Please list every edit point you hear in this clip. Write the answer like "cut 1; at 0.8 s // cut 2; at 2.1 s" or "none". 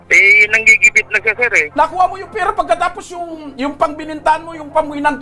cut 1; at 1.6 s